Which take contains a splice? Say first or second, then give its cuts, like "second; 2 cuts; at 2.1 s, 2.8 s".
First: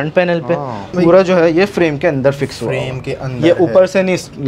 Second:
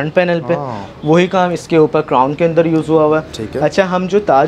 first; 1 cut; at 0.9 s